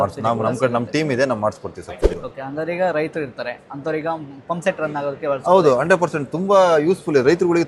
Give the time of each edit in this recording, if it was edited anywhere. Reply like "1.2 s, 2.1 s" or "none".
2.3 s